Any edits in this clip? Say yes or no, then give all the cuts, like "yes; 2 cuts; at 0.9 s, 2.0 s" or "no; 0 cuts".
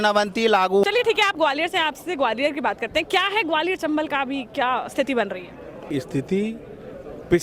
yes; 2 cuts; at 0.8 s, 5.9 s